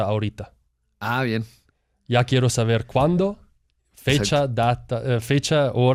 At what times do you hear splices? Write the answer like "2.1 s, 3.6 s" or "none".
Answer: none